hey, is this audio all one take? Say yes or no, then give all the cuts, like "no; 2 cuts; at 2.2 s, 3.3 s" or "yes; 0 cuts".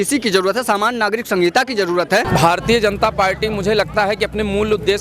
no; 1 cut; at 2.3 s